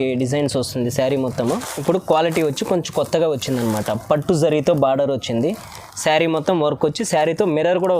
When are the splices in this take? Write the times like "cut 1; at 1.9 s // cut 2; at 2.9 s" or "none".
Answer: cut 1; at 1.7 s